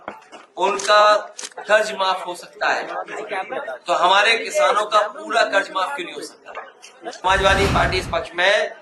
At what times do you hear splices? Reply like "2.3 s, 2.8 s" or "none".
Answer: 7.2 s